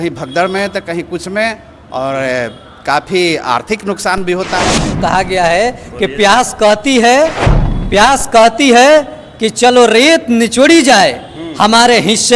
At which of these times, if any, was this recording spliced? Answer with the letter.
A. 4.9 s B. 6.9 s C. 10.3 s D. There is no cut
A